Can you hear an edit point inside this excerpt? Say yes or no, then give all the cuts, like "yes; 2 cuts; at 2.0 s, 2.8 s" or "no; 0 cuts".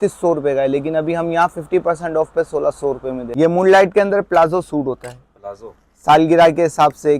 yes; 1 cut; at 3.3 s